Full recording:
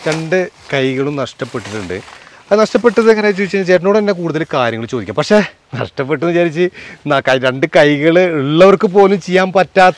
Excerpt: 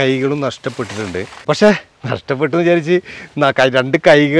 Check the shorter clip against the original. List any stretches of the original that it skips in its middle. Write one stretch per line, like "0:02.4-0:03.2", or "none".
0:02.1-0:05.0